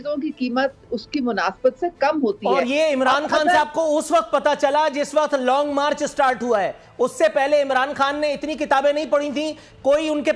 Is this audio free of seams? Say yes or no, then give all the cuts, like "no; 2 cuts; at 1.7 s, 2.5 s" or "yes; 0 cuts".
yes; 0 cuts